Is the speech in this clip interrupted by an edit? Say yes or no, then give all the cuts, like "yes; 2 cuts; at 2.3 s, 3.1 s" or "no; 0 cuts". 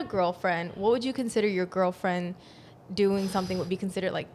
no; 0 cuts